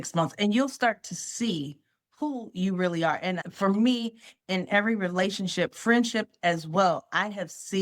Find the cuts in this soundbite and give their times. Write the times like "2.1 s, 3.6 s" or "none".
3.4 s

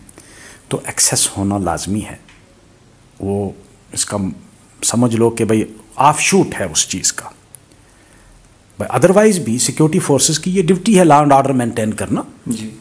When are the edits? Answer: none

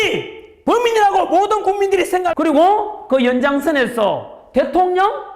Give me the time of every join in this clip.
2.2 s

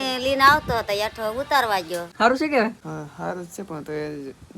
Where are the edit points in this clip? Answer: 2.1 s, 2.8 s

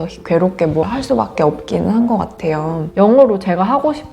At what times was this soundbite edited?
0.9 s, 2.9 s

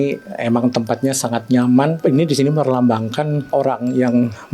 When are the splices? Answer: 2.0 s, 3.5 s

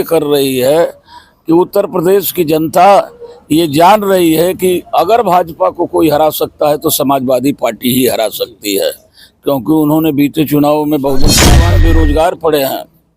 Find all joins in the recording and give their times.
11.5 s

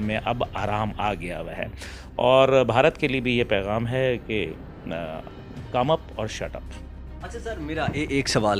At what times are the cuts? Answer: none

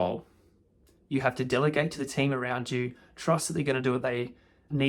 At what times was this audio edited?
none

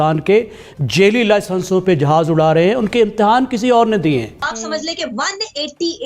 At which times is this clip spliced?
4.5 s

